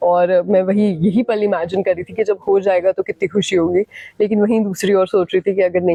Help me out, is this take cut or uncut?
uncut